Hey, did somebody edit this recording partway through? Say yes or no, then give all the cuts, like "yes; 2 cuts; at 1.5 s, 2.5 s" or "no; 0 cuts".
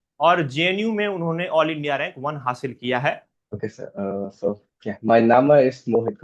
yes; 1 cut; at 3.3 s